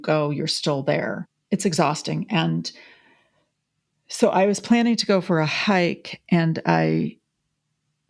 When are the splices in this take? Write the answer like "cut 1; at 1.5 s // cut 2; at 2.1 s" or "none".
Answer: cut 1; at 1.3 s